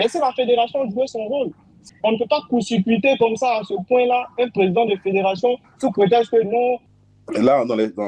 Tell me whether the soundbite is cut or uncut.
cut